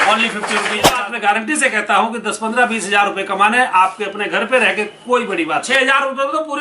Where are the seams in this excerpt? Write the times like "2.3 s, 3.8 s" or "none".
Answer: 1.0 s, 5.7 s